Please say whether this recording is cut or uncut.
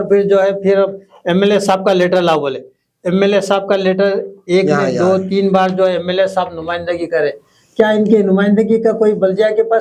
uncut